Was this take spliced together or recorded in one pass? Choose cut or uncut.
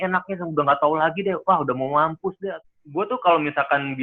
cut